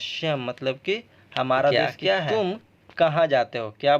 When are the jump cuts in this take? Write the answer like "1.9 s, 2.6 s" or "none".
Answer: 2.3 s